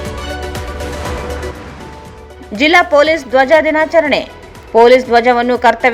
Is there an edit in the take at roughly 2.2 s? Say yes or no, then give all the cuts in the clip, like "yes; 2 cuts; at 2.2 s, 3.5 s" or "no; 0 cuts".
yes; 1 cut; at 2.2 s